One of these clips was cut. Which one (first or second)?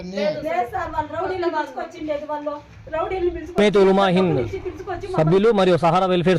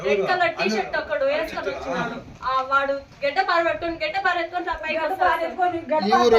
first